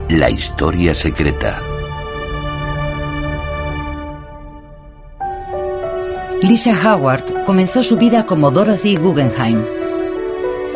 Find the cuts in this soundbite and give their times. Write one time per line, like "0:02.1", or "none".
0:05.9